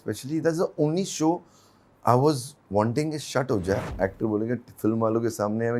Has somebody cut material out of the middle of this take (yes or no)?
yes